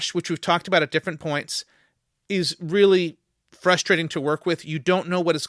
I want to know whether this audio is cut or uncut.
uncut